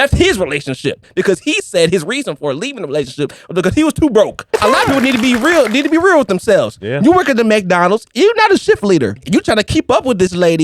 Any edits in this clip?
yes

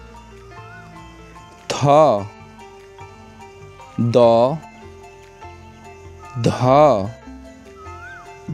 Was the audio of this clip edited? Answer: yes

